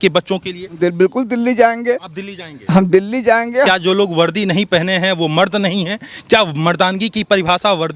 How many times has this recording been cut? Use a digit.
2